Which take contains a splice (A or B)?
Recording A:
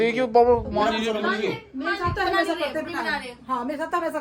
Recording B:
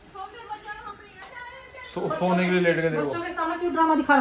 B